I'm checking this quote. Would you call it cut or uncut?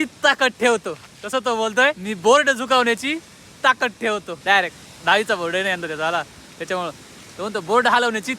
cut